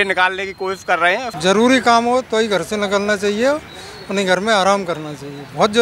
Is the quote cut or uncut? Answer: cut